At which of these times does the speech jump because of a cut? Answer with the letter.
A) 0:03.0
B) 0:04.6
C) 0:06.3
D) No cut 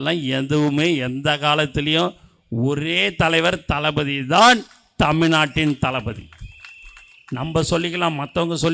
D